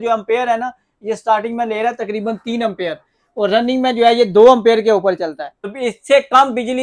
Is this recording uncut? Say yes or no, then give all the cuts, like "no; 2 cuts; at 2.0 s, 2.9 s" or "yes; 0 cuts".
no; 1 cut; at 5.7 s